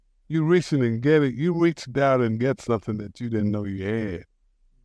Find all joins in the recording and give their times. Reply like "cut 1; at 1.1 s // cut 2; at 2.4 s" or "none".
none